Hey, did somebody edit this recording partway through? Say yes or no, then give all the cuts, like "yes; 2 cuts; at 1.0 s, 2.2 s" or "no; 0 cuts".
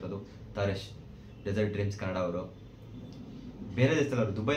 no; 0 cuts